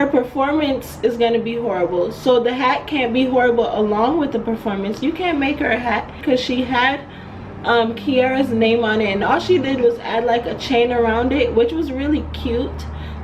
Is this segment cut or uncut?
cut